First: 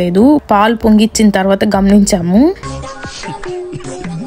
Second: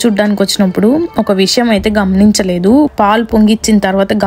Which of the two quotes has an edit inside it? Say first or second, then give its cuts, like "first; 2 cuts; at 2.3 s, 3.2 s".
first; 1 cut; at 2.8 s